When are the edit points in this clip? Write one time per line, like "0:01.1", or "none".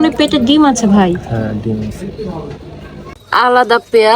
0:03.1